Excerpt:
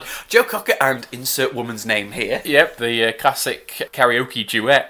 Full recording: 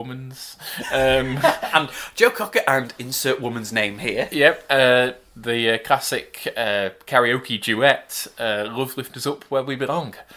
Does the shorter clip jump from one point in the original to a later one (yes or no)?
yes